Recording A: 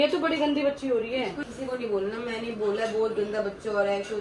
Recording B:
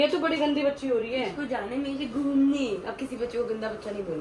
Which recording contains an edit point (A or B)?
A